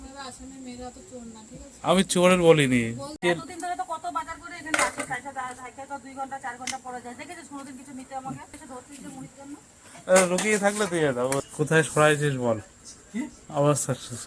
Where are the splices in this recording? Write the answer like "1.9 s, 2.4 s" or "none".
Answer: 3.1 s, 8.5 s, 11.5 s